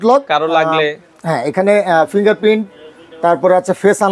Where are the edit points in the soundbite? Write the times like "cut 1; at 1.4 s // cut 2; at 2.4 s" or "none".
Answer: none